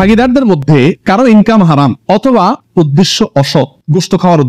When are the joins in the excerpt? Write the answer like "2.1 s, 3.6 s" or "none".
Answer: none